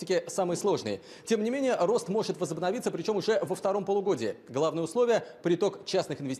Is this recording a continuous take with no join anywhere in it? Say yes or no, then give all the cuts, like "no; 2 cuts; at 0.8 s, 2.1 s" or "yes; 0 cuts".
no; 1 cut; at 1.1 s